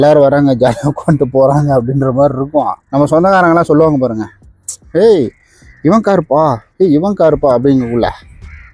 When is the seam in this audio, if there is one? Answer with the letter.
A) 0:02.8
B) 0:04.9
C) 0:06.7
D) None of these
A